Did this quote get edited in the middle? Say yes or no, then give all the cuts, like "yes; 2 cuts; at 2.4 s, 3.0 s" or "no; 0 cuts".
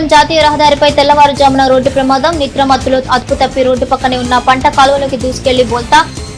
no; 0 cuts